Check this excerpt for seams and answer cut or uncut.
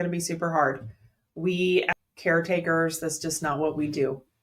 cut